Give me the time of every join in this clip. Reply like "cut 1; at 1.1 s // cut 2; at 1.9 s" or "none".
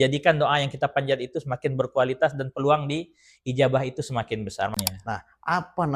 cut 1; at 4.7 s